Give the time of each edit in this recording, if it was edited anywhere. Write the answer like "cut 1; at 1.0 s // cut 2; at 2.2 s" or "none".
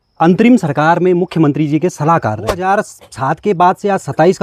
cut 1; at 2.6 s

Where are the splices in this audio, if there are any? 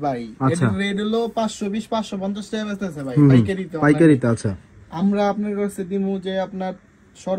none

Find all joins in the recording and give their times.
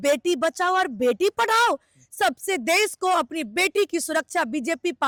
none

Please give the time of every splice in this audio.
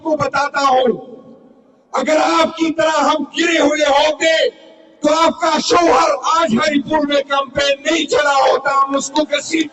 none

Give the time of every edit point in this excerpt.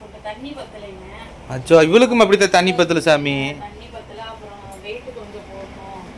none

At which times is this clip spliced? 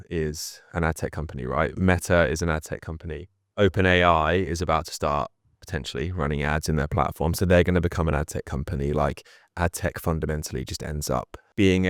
none

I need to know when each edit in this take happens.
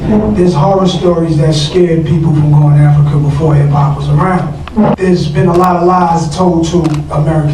cut 1; at 4.9 s

